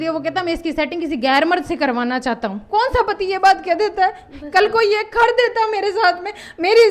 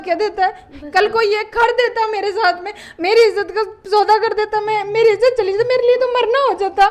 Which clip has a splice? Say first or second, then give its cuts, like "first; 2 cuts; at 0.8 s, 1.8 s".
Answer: first; 1 cut; at 2.6 s